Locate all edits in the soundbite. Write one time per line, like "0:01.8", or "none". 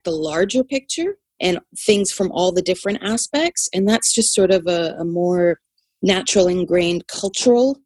0:01.7

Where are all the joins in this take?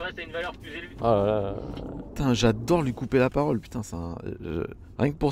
none

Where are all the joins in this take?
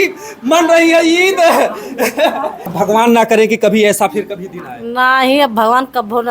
0:02.7

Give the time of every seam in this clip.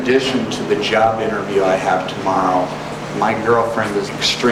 none

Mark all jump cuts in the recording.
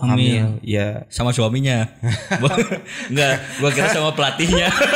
none

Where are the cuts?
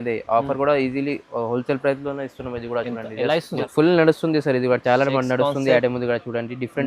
0:03.6

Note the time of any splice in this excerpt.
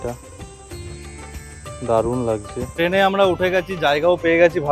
0:02.8

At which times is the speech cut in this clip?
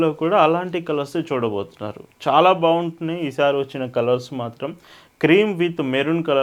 none

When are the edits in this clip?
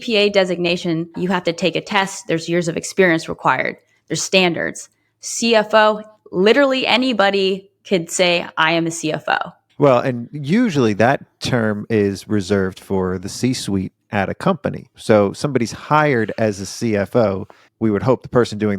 0:14.9

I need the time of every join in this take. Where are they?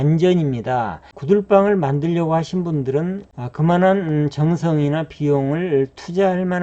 0:01.1
0:03.3

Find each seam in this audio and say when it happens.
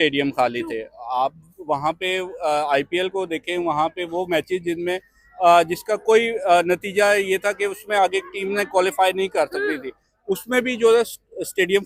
none

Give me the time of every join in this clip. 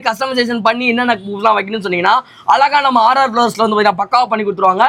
none

